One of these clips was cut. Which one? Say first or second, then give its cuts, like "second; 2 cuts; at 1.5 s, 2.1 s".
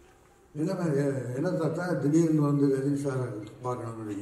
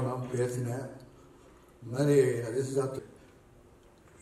second; 1 cut; at 3.0 s